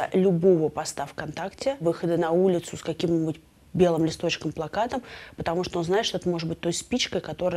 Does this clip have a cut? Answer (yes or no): yes